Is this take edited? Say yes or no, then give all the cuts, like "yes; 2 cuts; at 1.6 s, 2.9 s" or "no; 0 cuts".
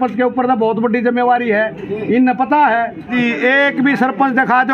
yes; 1 cut; at 3.1 s